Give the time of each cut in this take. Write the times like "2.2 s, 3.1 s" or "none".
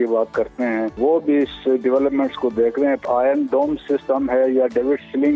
0.9 s, 3.0 s